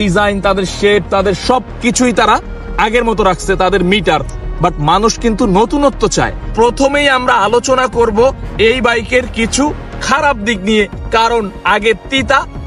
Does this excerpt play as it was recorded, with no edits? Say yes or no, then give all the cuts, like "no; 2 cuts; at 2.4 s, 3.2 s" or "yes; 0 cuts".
no; 1 cut; at 6.4 s